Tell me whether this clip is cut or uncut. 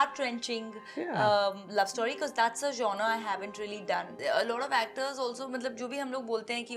cut